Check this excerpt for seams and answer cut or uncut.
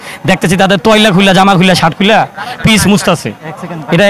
uncut